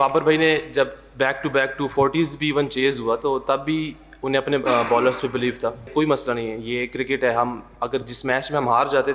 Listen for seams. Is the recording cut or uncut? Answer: cut